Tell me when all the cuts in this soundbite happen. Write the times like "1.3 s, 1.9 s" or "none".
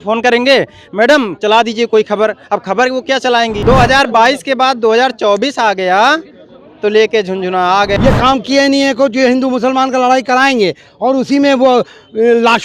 3.6 s, 7.9 s